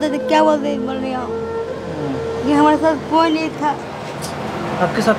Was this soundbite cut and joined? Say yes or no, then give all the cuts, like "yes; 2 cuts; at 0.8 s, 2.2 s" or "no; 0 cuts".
no; 0 cuts